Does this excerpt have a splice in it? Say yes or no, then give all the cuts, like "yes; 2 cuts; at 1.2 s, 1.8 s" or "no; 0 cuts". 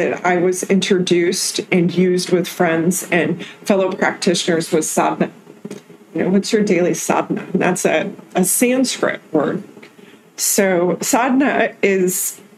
no; 0 cuts